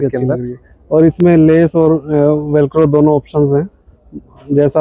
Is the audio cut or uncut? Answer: uncut